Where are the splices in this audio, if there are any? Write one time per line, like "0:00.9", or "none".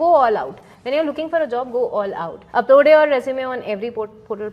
0:02.4